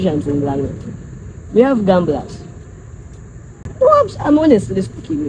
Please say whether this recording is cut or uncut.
uncut